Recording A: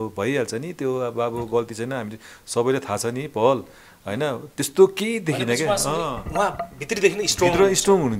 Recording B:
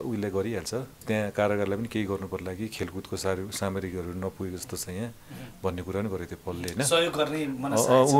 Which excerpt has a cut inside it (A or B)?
B